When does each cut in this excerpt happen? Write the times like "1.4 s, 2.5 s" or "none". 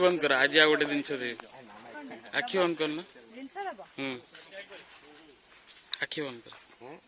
none

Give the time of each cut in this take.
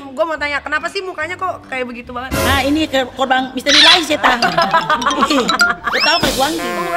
none

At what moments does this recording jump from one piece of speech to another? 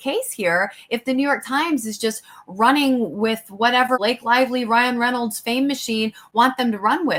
none

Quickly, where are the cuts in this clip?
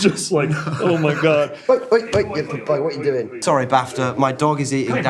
1.6 s

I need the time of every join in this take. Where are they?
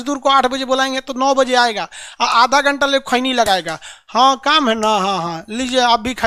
none

